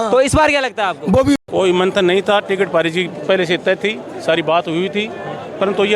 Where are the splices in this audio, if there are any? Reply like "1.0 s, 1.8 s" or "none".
1.4 s